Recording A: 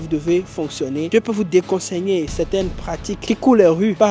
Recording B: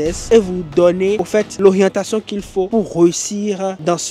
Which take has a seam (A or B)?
A